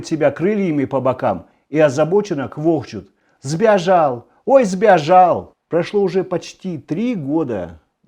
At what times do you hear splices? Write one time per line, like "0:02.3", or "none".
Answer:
0:05.5